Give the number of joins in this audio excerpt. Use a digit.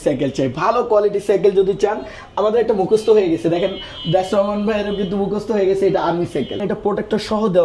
1